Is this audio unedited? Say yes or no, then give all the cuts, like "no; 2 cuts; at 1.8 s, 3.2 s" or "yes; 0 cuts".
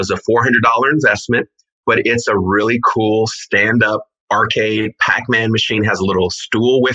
no; 1 cut; at 4.2 s